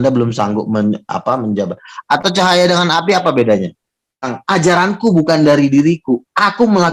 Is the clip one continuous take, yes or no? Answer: no